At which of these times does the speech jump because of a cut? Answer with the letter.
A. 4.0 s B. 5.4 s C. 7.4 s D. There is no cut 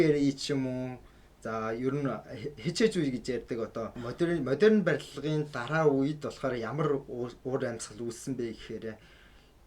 A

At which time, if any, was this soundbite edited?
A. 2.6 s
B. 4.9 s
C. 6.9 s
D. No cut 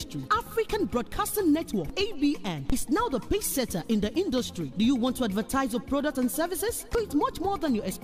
C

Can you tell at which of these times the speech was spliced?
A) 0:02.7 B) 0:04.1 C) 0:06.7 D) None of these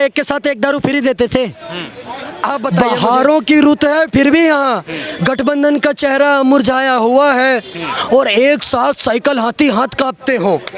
A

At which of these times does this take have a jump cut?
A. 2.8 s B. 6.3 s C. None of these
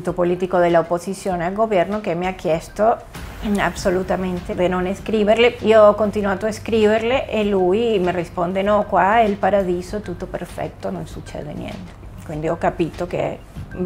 C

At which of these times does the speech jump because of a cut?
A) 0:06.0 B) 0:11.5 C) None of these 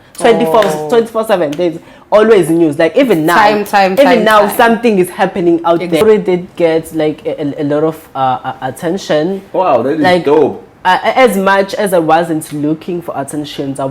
A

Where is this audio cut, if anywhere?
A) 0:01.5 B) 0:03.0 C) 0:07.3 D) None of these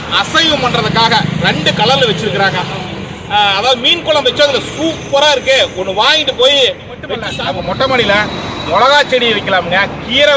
C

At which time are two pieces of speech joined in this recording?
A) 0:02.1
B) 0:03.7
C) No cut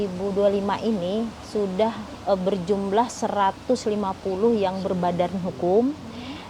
A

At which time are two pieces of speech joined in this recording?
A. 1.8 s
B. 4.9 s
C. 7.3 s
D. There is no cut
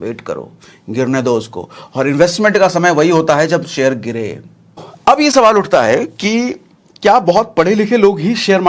B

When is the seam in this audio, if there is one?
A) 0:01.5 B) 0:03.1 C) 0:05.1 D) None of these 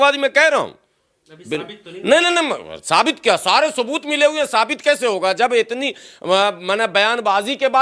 D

